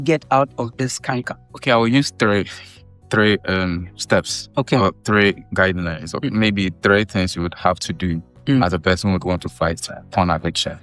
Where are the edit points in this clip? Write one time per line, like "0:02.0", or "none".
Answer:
none